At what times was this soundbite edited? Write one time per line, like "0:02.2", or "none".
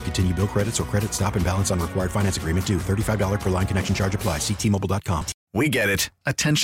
0:05.3